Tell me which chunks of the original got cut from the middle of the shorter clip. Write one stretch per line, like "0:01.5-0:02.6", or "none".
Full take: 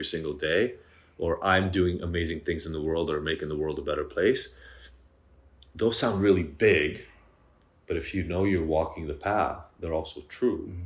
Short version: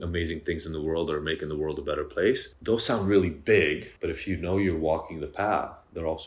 0:04.5-0:05.6
0:07.0-0:07.8